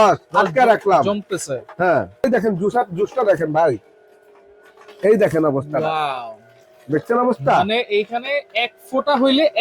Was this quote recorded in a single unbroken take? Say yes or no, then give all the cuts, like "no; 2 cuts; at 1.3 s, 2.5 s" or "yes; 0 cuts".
no; 1 cut; at 2.2 s